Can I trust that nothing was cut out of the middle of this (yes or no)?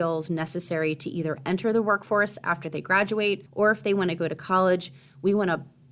no